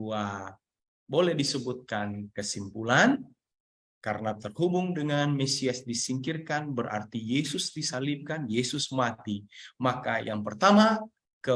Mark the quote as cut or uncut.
uncut